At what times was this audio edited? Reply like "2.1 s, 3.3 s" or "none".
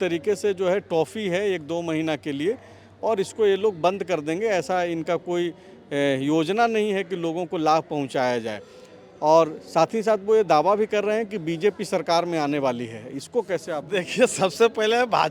none